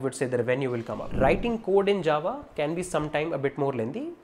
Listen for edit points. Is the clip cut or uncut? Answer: cut